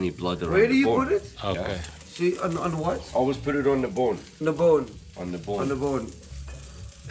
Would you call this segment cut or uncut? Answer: cut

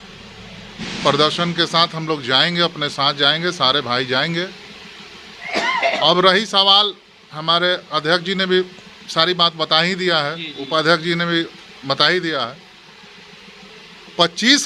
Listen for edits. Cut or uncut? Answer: uncut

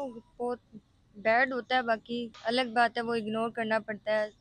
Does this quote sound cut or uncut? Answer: cut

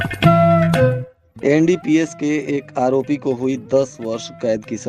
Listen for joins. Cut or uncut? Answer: cut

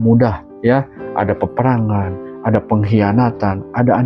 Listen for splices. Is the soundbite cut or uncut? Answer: uncut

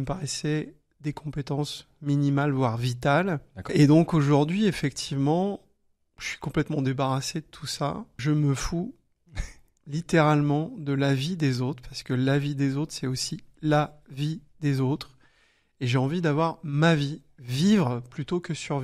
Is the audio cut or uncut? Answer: cut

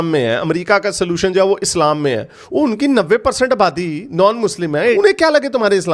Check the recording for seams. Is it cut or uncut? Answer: cut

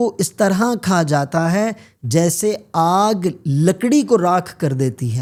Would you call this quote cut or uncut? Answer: uncut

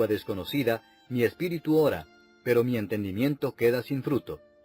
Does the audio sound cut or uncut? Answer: uncut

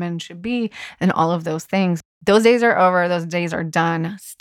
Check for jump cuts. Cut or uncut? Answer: cut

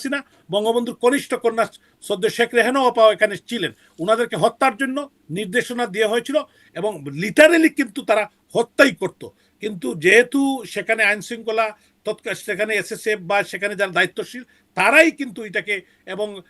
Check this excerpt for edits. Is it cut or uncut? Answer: uncut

